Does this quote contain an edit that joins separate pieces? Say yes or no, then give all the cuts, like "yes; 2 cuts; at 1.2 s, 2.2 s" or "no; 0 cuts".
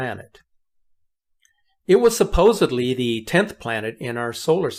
no; 0 cuts